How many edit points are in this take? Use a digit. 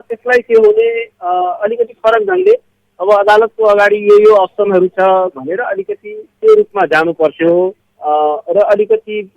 0